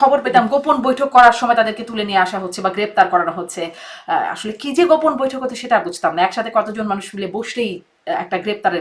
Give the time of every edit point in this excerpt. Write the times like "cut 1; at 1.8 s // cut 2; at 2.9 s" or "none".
none

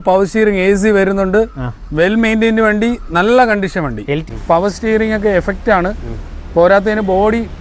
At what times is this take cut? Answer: cut 1; at 4.2 s

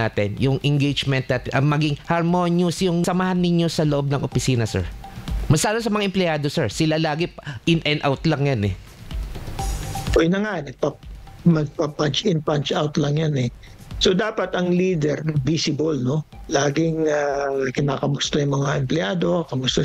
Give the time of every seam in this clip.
cut 1; at 3.0 s

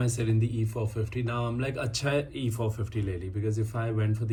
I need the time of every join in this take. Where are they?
none

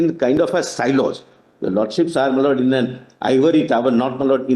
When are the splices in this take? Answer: none

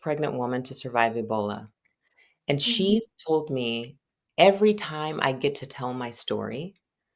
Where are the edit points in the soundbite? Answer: none

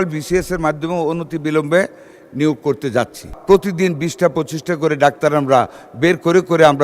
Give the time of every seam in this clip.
cut 1; at 3.3 s

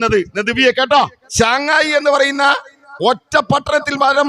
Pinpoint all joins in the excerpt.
cut 1; at 1.2 s

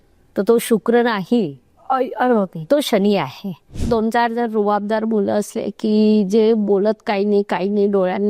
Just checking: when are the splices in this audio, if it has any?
cut 1; at 3.7 s

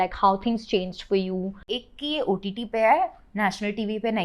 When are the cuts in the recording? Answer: cut 1; at 1.7 s

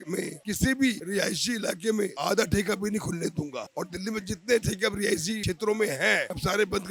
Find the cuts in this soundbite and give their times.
none

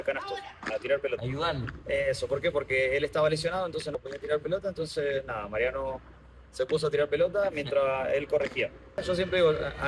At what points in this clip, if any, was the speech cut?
cut 1; at 1.2 s // cut 2; at 3.9 s // cut 3; at 9.0 s

